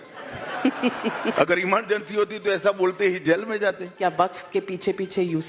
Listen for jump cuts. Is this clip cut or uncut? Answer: cut